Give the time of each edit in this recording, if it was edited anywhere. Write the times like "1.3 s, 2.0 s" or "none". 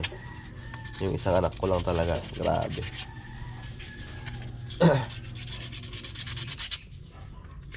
none